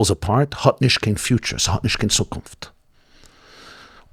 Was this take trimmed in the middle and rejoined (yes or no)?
no